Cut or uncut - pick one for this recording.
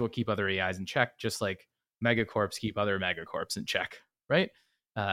uncut